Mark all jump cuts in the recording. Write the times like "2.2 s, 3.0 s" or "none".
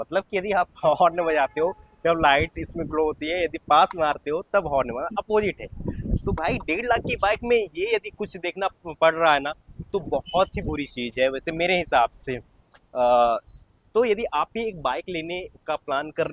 none

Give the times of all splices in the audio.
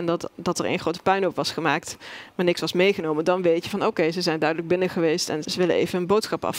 5.4 s

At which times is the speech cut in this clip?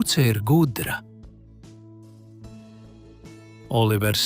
1.0 s, 3.2 s

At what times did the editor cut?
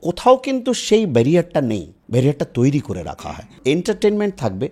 1.9 s, 3.1 s

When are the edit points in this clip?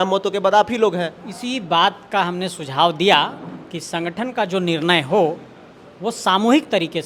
none

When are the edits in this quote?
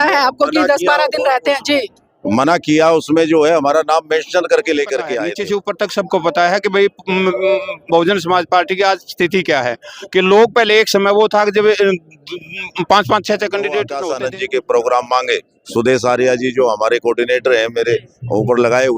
5.3 s, 14.0 s

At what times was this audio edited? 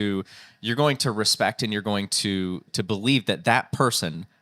2.7 s

